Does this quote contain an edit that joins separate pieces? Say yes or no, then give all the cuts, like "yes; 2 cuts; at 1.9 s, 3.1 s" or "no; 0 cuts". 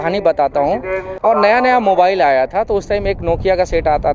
yes; 1 cut; at 1.1 s